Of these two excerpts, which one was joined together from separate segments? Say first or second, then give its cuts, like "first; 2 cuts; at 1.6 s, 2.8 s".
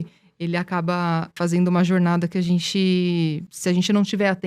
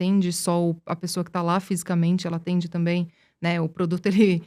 first; 2 cuts; at 1.3 s, 3.5 s